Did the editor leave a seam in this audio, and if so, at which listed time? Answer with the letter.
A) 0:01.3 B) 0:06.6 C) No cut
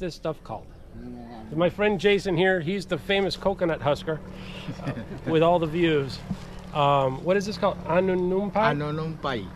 C